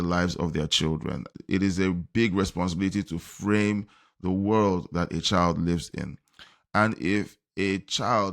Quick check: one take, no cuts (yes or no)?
no